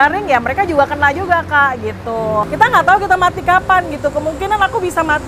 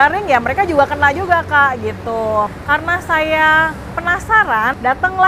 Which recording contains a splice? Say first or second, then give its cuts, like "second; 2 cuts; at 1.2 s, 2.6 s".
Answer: first; 1 cut; at 2.5 s